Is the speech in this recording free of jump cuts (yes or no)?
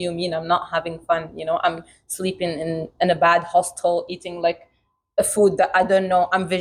yes